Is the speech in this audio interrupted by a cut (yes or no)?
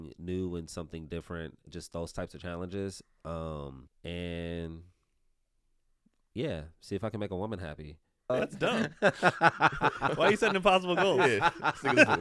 yes